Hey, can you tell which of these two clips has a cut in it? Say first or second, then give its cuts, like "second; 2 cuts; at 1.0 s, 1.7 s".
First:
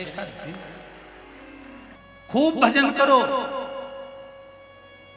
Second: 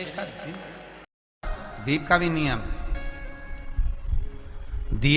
first; 2 cuts; at 0.9 s, 2.4 s